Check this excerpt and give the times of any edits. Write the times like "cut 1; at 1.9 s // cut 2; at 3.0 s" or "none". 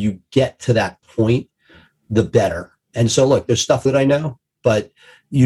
cut 1; at 3.8 s